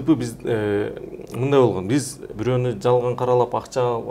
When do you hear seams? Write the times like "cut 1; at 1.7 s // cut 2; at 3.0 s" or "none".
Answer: cut 1; at 2.3 s